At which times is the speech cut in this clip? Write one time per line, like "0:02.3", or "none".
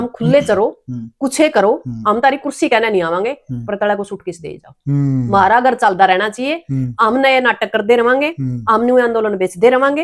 none

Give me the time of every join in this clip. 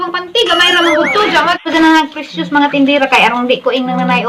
0:01.7

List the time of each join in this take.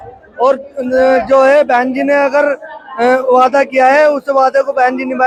none

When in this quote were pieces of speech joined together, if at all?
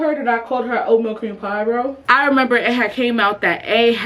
0:01.9

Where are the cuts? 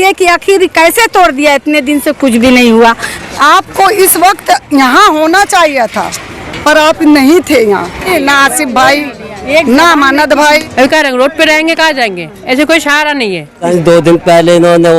0:03.1
0:08.1
0:10.7
0:13.7

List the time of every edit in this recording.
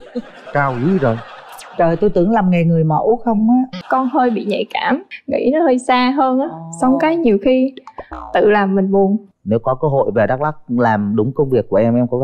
0:03.8
0:05.1
0:09.3

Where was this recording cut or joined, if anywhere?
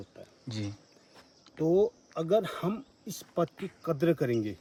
none

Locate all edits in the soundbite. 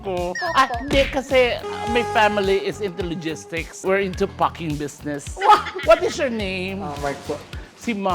0:05.7

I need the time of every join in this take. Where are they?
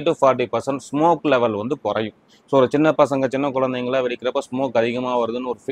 none

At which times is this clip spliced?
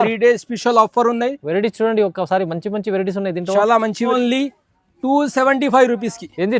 0:04.1

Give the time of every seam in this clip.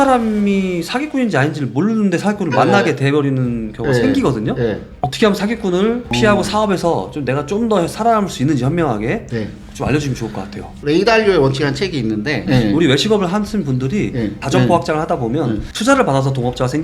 0:12.4

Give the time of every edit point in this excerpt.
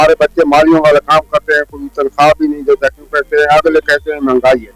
none

